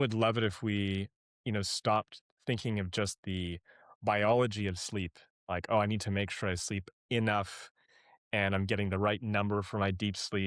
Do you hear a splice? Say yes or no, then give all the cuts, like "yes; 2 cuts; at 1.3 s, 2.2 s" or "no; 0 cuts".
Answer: no; 0 cuts